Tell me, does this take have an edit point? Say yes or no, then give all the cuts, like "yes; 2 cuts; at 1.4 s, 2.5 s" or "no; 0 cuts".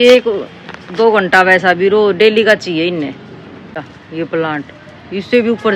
yes; 1 cut; at 4.0 s